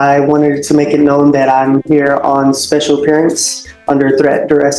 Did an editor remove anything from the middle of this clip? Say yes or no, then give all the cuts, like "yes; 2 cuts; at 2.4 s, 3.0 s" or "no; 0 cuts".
no; 0 cuts